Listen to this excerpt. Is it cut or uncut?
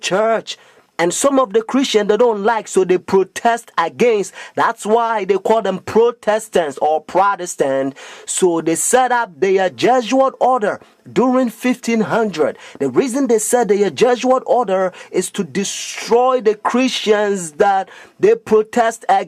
cut